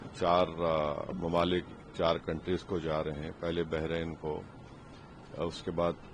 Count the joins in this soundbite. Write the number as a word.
zero